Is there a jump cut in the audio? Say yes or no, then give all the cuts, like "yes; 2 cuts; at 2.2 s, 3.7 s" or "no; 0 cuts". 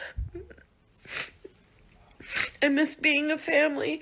no; 0 cuts